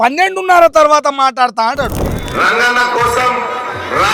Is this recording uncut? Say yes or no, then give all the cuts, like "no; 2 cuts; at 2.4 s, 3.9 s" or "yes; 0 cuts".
no; 1 cut; at 2.2 s